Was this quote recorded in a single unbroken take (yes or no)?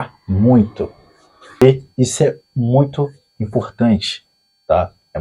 no